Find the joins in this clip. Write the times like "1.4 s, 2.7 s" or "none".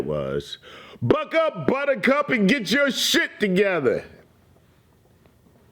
none